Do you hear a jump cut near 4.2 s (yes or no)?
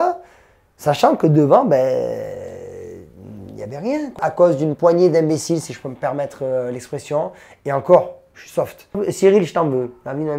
yes